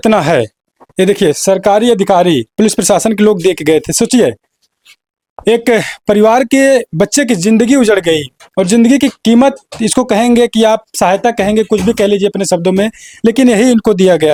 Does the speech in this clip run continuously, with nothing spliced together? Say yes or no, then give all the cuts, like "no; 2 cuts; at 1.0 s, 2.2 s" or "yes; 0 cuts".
yes; 0 cuts